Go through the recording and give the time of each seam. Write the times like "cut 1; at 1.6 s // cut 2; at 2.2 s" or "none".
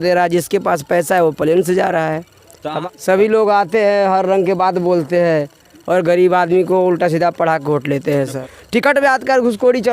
cut 1; at 2.7 s // cut 2; at 8.4 s